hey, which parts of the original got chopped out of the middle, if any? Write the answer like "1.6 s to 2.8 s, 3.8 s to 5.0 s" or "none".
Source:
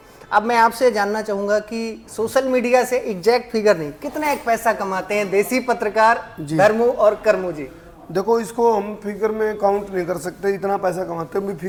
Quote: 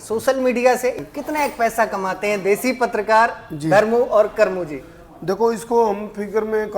3.1 s to 3.9 s

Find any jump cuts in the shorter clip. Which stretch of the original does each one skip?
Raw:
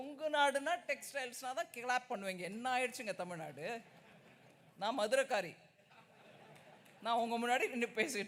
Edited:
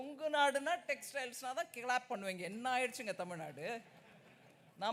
none

